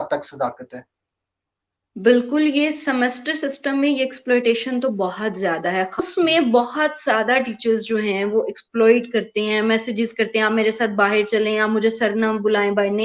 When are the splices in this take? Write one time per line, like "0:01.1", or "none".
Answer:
0:06.0